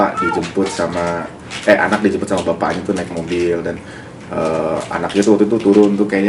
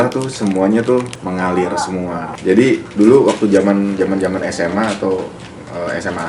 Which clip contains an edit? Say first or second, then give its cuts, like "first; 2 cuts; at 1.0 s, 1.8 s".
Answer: second; 2 cuts; at 1.1 s, 2.3 s